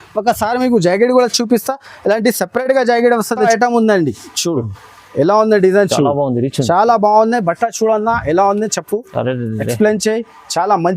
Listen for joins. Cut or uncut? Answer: cut